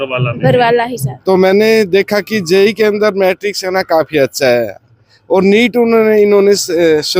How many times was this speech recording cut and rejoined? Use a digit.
1